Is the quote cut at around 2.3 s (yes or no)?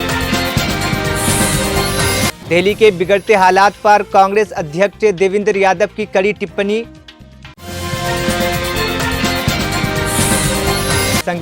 yes